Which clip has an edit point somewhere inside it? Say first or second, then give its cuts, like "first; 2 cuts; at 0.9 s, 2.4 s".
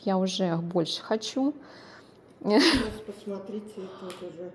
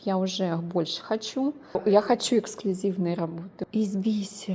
second; 2 cuts; at 1.8 s, 3.5 s